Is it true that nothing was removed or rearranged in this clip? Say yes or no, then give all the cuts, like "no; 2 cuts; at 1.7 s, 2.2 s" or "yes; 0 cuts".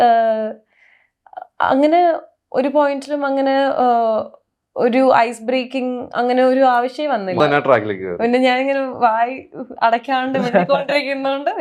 no; 1 cut; at 7.4 s